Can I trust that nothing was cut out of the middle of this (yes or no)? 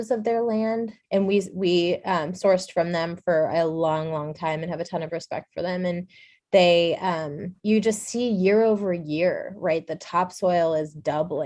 no